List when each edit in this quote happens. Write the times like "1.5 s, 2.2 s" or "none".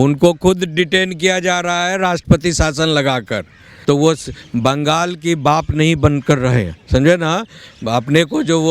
3.7 s